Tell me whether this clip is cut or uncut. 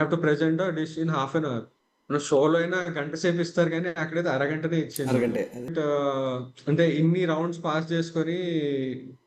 cut